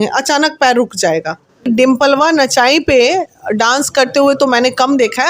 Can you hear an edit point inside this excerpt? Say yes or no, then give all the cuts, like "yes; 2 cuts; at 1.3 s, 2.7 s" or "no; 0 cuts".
yes; 1 cut; at 1.7 s